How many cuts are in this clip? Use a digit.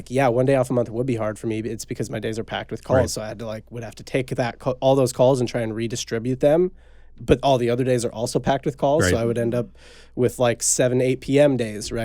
0